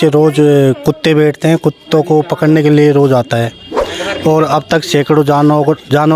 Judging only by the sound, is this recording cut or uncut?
uncut